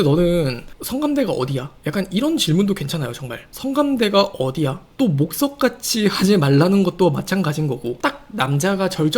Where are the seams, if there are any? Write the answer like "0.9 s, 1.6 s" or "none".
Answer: 4.8 s, 7.9 s

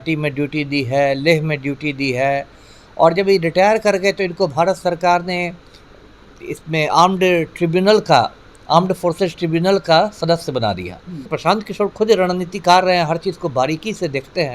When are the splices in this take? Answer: 11.3 s

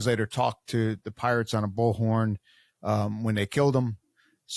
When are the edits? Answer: none

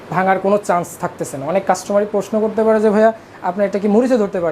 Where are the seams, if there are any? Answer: none

